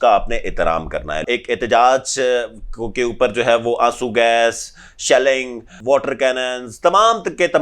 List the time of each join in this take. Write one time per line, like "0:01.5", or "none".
0:01.2
0:05.8

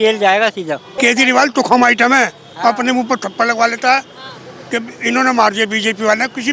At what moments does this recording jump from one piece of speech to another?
0:00.9

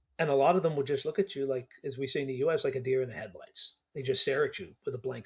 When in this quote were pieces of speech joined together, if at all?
none

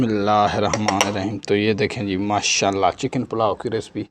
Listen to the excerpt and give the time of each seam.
none

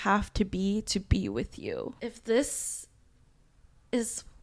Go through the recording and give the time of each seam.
0:01.9

